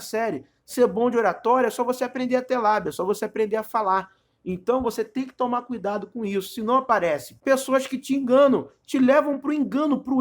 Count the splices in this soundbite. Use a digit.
1